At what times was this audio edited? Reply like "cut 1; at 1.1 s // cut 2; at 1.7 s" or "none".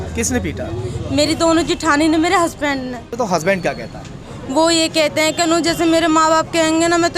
cut 1; at 3.2 s